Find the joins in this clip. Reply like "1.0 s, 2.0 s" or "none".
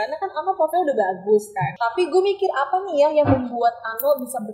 1.7 s